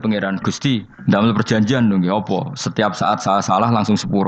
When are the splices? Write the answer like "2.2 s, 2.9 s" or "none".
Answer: 0.9 s